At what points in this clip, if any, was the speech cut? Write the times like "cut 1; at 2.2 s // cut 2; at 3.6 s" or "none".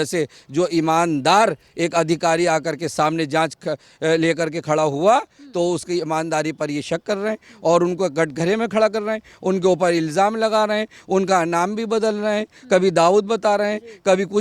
none